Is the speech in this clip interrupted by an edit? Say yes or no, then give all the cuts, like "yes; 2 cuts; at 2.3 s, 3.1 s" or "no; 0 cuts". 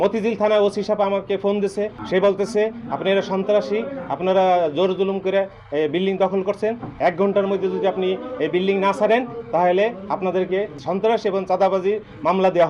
yes; 2 cuts; at 2.0 s, 10.8 s